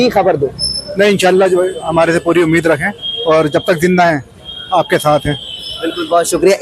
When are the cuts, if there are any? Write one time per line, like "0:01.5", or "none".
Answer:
none